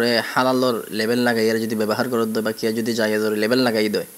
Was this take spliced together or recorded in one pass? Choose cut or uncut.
uncut